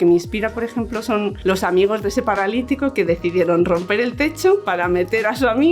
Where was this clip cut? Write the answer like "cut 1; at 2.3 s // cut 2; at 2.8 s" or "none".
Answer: cut 1; at 1.4 s // cut 2; at 4.7 s